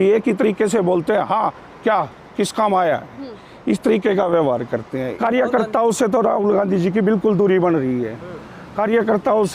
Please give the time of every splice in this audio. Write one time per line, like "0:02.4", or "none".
0:05.1